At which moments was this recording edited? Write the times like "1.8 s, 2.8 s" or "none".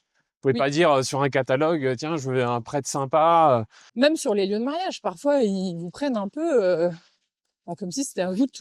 3.8 s